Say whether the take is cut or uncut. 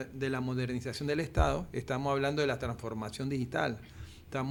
uncut